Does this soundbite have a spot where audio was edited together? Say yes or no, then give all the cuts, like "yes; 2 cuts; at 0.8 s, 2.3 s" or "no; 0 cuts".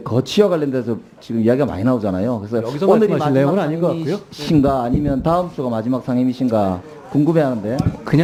no; 0 cuts